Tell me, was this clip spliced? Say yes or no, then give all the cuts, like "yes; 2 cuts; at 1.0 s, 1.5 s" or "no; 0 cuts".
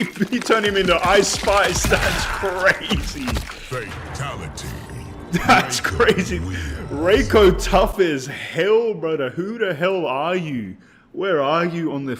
no; 0 cuts